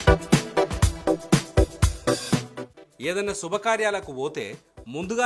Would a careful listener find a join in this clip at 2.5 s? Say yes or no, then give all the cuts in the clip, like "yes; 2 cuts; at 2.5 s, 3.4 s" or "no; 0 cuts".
yes; 1 cut; at 2.5 s